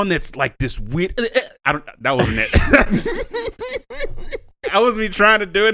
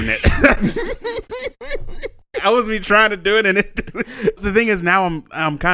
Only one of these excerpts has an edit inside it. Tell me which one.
second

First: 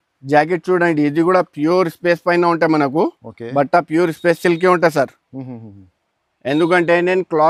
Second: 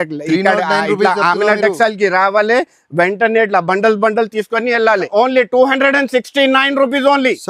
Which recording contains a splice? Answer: second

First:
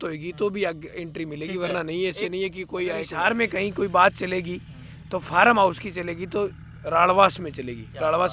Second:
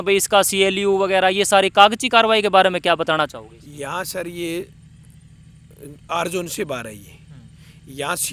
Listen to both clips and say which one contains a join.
first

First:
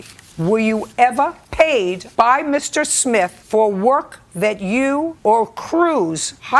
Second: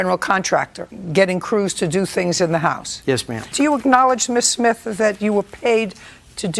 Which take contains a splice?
second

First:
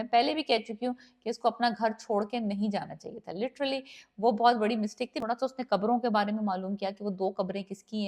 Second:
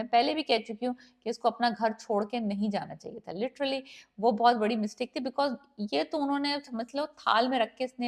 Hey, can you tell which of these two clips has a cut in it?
first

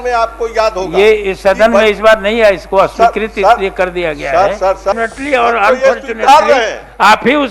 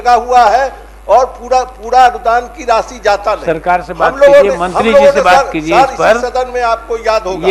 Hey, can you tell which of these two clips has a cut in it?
first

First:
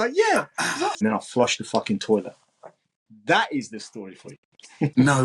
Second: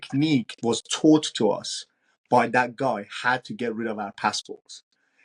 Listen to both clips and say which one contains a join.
first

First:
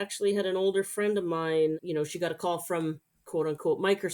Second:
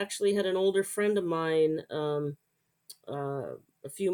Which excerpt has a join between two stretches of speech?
first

